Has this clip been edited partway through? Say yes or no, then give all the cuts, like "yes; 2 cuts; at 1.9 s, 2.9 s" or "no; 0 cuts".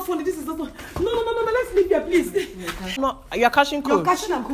yes; 1 cut; at 3.0 s